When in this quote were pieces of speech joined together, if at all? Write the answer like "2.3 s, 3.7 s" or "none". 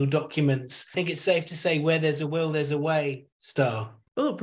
0.9 s, 3.8 s